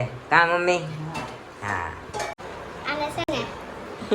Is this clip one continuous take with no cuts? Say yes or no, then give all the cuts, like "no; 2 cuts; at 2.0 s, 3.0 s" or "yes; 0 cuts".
no; 1 cut; at 2.3 s